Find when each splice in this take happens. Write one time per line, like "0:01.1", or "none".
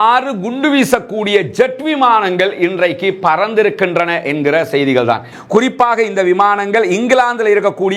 0:05.3

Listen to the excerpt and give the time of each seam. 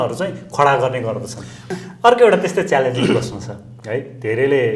0:01.6

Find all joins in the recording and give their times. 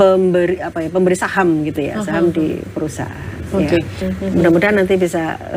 0:04.0

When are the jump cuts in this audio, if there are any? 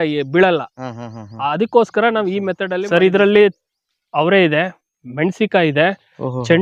0:02.6

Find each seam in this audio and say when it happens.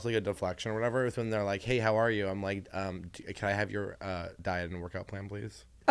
0:04.4

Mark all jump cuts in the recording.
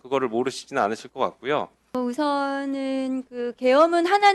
0:01.9

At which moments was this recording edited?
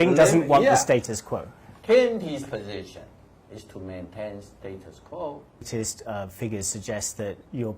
0:05.7

